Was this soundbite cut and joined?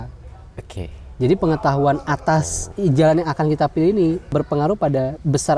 yes; 2 cuts; at 2.7 s, 4.3 s

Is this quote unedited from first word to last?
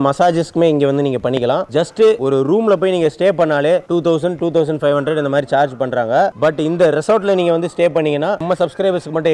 no; 2 cuts; at 1.7 s, 8.4 s

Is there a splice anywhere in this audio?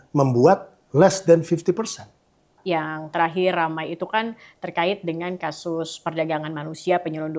yes; 1 cut; at 2.6 s

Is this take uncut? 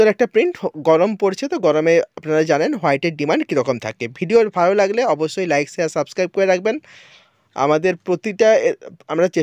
yes; 0 cuts

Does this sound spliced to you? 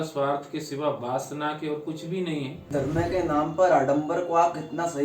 yes; 1 cut; at 2.6 s

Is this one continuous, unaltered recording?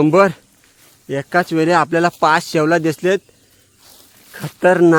yes; 0 cuts

